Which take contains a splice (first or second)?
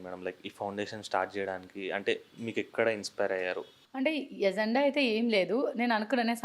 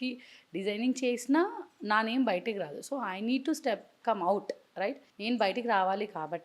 second